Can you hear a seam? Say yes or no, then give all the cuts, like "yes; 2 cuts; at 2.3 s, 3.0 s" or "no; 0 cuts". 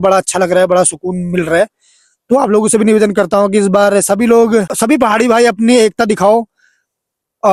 no; 0 cuts